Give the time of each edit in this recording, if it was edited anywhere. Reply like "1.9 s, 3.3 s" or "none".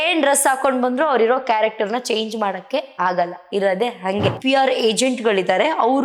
4.4 s